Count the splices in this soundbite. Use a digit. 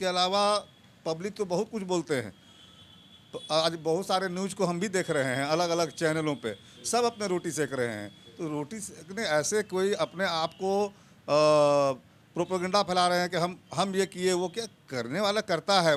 0